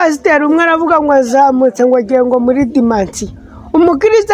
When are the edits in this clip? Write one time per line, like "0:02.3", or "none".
none

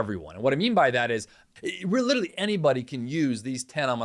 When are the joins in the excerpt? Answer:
0:01.5

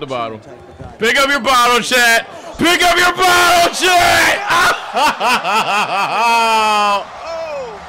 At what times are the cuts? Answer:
none

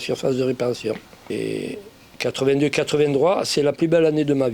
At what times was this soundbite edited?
0:01.3

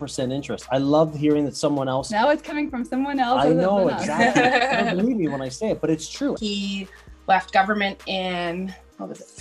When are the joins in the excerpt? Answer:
0:06.4

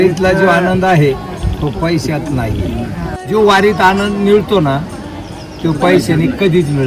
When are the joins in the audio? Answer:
0:03.2

